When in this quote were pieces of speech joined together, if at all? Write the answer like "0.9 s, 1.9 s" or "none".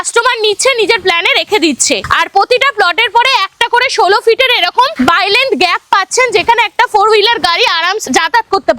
2.0 s, 8.0 s